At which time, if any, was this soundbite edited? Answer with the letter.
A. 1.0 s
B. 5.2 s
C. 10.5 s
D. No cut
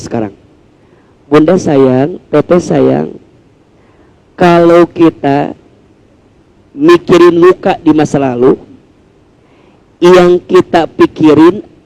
D